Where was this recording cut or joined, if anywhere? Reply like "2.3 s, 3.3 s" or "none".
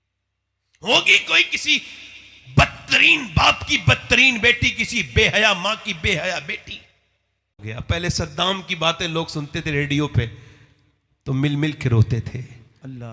7.6 s

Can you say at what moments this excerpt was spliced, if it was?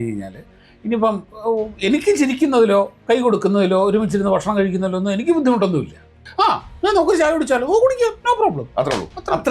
6.2 s

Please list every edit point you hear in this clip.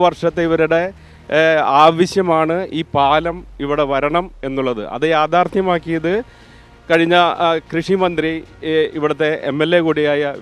none

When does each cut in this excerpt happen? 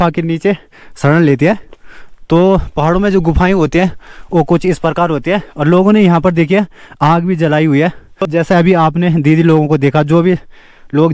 none

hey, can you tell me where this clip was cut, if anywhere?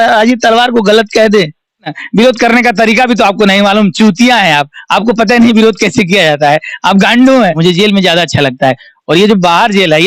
2.0 s, 7.6 s

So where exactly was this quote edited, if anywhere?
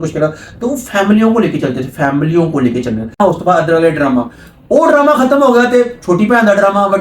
3.2 s

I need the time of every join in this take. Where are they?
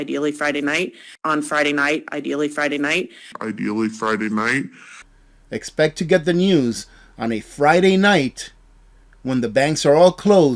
1.1 s, 3.2 s

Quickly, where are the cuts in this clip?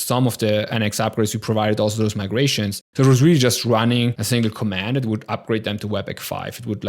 2.8 s, 4.2 s

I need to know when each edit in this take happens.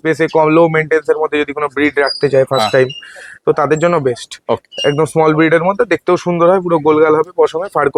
none

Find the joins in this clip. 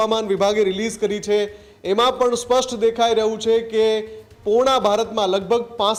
none

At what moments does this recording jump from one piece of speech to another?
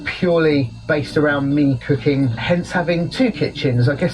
2.4 s

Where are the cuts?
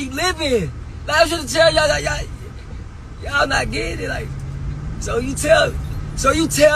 none

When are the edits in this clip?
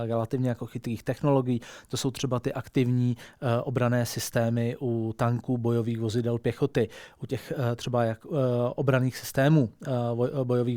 none

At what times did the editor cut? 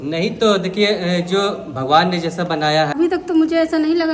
2.9 s

